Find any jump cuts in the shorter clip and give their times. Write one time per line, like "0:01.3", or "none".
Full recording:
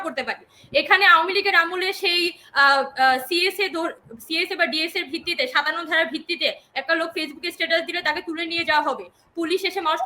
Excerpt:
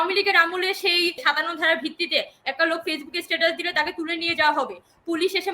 0:01.2